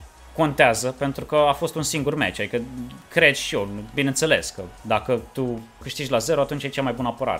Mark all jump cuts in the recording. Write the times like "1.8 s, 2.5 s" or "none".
5.9 s